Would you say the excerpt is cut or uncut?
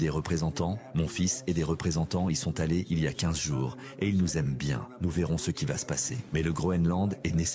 uncut